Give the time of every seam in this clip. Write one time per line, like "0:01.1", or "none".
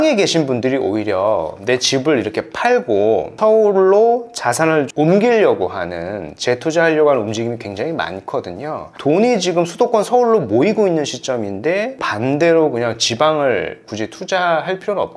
0:03.4
0:08.9
0:12.0